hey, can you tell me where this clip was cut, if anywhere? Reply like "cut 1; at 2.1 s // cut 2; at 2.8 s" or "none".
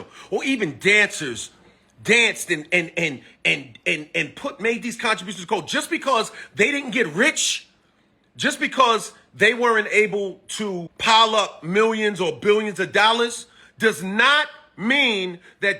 cut 1; at 10.9 s

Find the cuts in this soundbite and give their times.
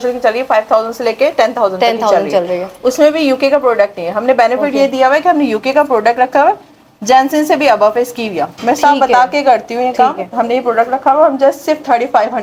none

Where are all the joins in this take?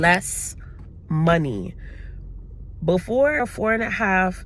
cut 1; at 3.4 s

